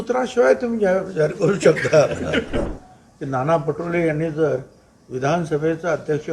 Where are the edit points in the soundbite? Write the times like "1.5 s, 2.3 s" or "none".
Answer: 2.7 s